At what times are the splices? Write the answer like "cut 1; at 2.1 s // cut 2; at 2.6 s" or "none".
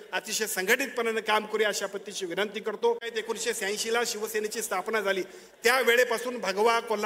cut 1; at 3.2 s